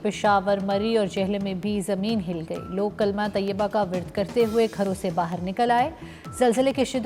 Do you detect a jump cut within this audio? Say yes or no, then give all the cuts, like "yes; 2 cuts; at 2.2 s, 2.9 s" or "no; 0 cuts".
no; 0 cuts